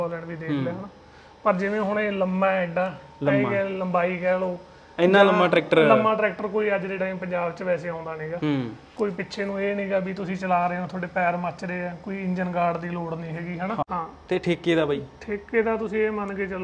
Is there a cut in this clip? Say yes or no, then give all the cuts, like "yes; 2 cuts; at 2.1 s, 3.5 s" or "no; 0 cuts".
yes; 1 cut; at 13.9 s